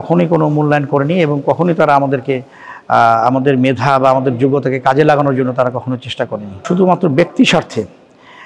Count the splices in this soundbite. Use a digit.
1